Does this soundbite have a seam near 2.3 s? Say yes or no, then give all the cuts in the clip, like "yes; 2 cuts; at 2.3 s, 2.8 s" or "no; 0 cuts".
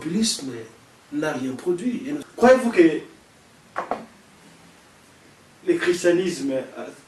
yes; 1 cut; at 2.3 s